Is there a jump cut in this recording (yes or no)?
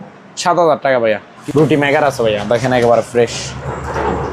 yes